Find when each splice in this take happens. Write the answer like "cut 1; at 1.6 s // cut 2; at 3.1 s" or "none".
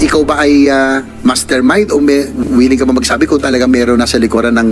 cut 1; at 1.1 s